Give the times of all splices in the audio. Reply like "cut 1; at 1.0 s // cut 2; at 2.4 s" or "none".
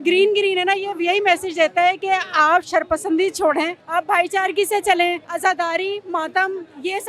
cut 1; at 3.8 s // cut 2; at 5.3 s